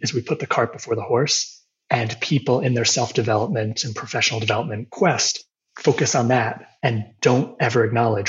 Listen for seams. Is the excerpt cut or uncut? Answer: cut